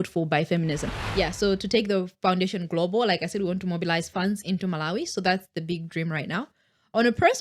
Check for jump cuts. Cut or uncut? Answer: cut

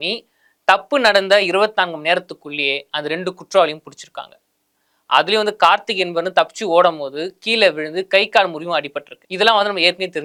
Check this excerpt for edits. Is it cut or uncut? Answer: uncut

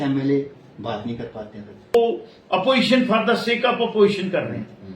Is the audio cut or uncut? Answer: cut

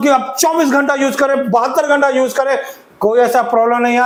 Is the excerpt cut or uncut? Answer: uncut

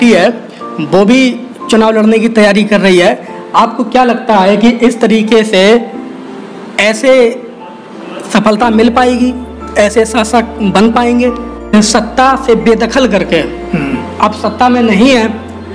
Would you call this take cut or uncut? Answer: cut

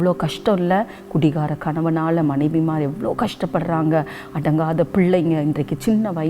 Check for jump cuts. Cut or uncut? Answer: uncut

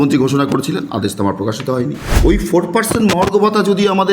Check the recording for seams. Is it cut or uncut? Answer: cut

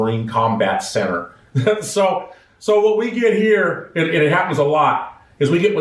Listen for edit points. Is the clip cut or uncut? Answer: uncut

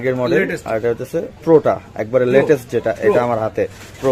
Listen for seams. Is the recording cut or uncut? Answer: uncut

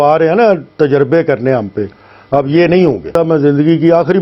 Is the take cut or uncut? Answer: cut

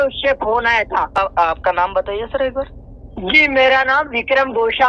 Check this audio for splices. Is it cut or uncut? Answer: cut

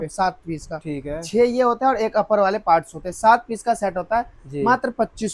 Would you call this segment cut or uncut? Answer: uncut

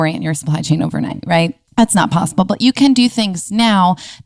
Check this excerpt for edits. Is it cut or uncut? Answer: cut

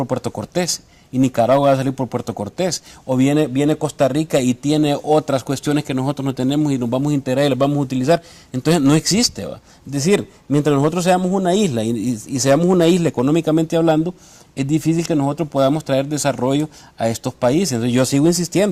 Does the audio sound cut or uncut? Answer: uncut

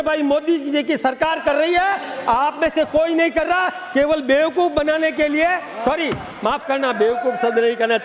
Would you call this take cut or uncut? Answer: uncut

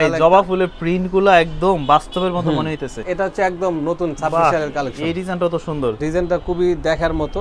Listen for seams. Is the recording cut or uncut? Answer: cut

